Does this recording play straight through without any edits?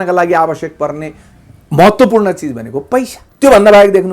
no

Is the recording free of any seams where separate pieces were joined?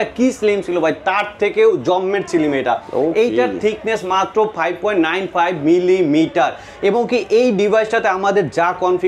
yes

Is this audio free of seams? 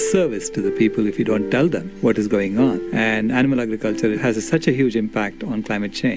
yes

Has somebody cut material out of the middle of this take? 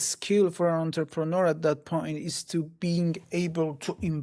no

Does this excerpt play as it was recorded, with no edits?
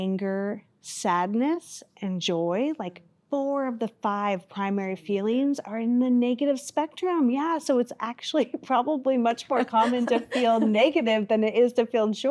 yes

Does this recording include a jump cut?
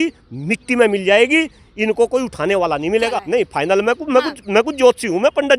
yes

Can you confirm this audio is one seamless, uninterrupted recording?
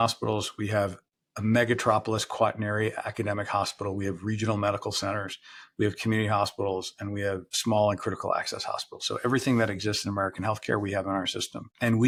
yes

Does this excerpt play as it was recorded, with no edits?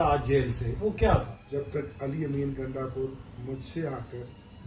no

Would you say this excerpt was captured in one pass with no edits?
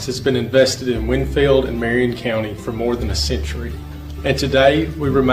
no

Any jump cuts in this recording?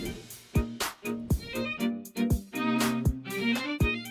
no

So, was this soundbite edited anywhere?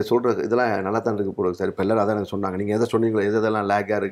no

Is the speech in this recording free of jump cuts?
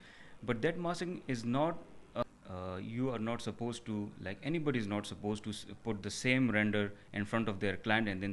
no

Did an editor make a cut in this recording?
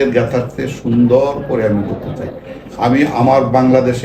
no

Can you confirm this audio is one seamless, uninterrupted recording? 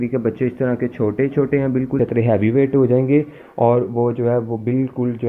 no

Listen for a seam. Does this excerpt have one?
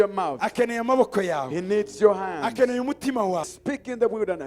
yes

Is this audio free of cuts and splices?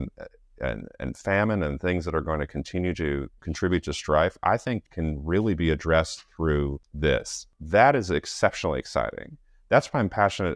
no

